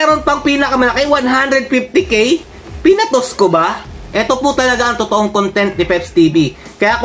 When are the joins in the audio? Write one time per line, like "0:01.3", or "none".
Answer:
0:03.9